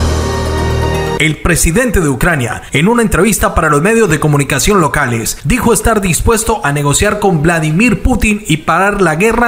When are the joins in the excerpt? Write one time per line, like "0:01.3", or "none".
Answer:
none

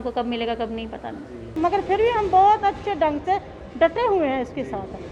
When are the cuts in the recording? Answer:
0:01.6

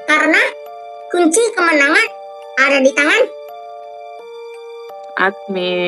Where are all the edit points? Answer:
0:03.4
0:05.1

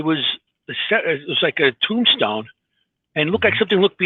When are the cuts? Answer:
none

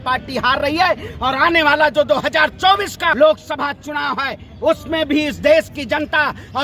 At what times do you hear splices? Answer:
0:03.1

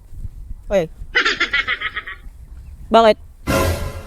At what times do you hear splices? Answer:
none

